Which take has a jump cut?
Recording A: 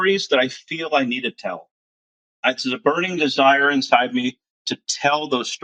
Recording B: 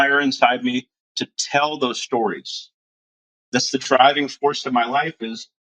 B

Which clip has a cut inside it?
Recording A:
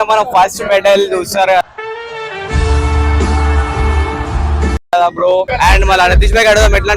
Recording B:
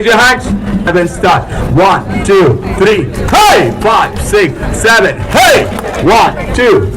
A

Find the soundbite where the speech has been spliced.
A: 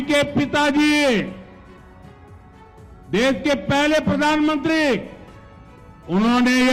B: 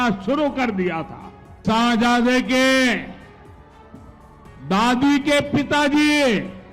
B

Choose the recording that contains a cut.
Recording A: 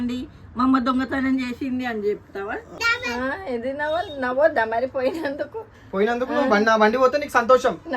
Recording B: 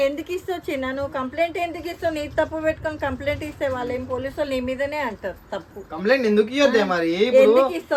A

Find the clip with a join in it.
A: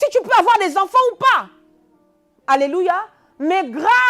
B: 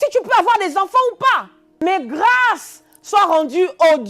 B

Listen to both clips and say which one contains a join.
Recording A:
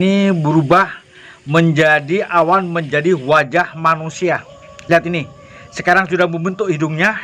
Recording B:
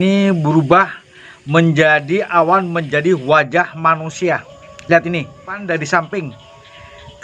B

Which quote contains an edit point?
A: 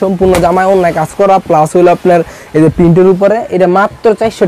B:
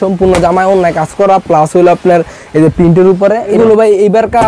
B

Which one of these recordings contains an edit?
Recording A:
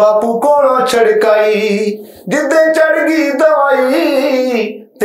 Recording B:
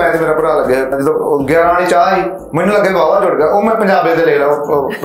B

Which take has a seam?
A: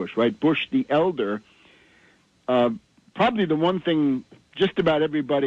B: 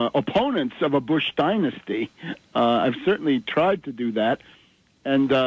B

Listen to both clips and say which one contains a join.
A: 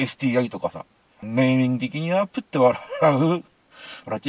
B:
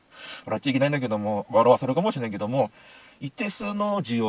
A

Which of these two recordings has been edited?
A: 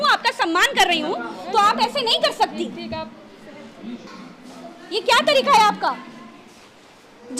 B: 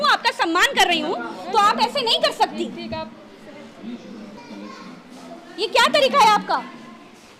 A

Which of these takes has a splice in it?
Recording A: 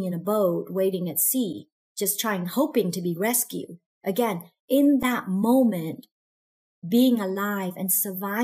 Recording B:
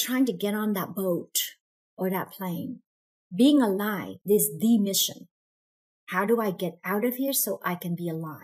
B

